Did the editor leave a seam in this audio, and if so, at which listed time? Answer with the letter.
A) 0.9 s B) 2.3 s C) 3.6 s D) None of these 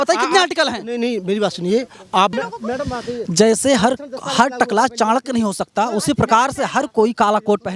B